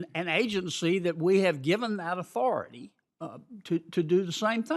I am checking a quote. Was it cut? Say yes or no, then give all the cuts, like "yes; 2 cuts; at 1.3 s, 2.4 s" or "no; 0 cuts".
yes; 1 cut; at 2.8 s